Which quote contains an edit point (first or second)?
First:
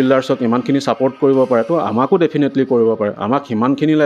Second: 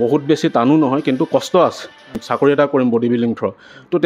second